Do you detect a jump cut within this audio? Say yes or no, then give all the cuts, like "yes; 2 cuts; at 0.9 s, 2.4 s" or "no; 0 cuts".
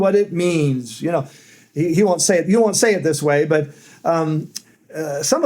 no; 0 cuts